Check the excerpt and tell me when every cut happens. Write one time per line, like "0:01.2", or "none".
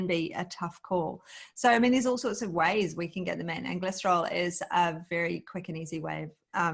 none